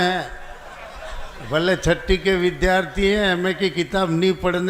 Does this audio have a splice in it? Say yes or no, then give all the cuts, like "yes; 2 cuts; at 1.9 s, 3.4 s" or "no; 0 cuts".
no; 0 cuts